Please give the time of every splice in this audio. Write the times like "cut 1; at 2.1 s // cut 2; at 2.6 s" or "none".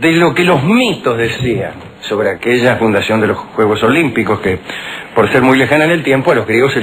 cut 1; at 5.6 s